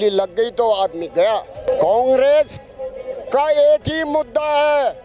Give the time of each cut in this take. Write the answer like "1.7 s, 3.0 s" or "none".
1.7 s